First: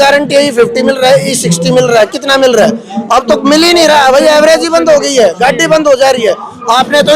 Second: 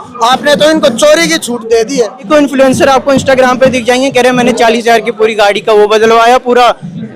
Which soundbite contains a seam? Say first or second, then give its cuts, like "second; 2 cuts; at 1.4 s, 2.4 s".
second; 1 cut; at 2.3 s